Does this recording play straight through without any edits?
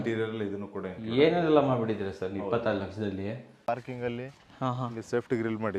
no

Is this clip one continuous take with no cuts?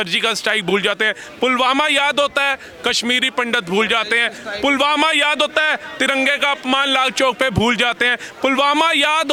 yes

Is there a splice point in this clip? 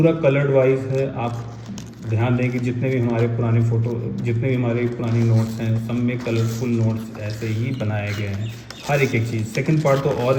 no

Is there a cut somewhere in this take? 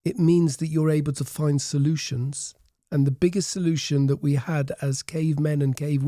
no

